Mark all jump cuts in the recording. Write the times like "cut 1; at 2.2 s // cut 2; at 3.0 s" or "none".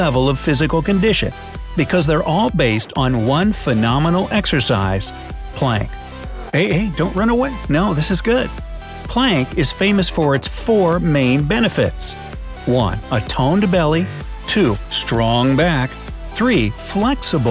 none